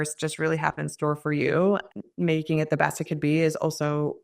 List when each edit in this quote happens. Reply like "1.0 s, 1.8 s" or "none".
1.9 s